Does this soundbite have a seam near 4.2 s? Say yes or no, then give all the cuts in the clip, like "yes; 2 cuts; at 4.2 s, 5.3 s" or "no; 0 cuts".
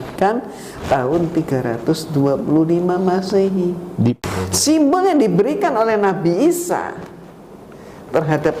yes; 1 cut; at 4.2 s